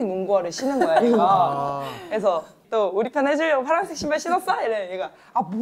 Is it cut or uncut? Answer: uncut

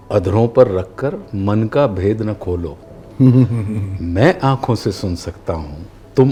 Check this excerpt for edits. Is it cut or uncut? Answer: uncut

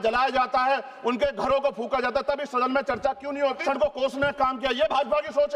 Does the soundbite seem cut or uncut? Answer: cut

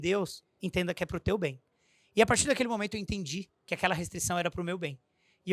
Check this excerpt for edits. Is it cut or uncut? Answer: uncut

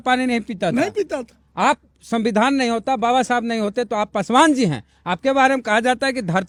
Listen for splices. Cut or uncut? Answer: uncut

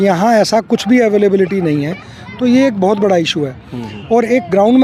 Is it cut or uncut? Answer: uncut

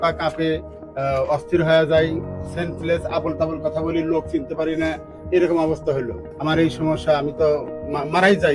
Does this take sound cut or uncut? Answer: cut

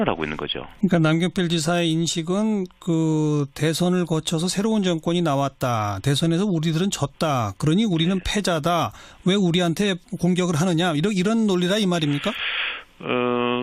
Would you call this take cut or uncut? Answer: cut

